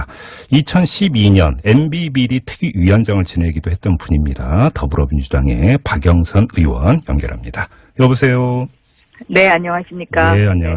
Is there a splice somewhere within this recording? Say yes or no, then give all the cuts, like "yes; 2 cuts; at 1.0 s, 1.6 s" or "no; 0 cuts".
yes; 1 cut; at 2.0 s